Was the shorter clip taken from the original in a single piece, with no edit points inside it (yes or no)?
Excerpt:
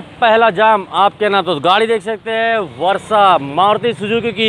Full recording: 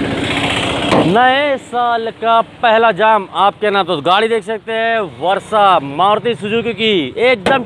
yes